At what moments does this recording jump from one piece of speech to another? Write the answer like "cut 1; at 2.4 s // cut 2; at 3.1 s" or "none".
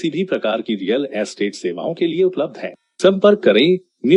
none